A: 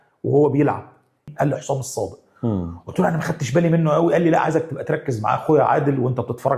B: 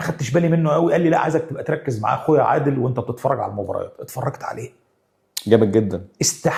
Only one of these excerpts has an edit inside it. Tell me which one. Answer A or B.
A